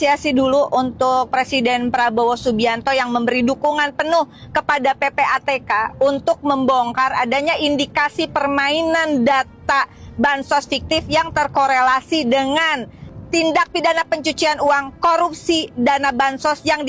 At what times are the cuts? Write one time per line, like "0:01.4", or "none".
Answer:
none